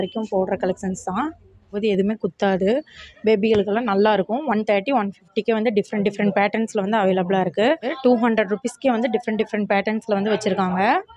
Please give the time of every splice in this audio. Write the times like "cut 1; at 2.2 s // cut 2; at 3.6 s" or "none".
cut 1; at 1.7 s // cut 2; at 7.9 s

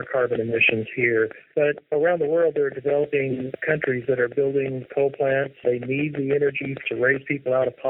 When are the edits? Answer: cut 1; at 6.8 s

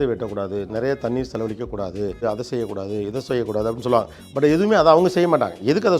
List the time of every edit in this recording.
cut 1; at 2.2 s

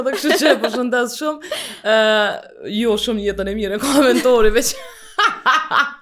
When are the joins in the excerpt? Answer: none

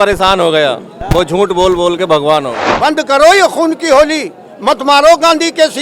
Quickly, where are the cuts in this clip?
cut 1; at 2.6 s

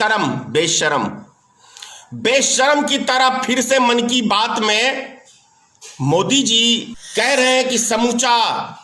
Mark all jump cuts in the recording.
cut 1; at 7.0 s

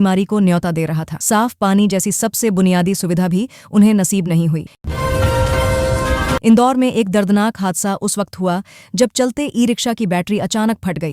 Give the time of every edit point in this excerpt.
cut 1; at 4.8 s // cut 2; at 6.4 s

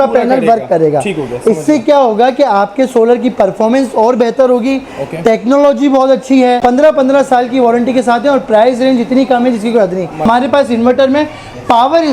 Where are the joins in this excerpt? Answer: cut 1; at 6.6 s // cut 2; at 10.2 s

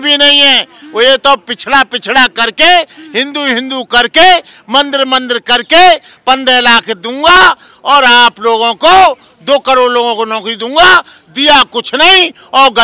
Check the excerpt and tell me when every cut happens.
none

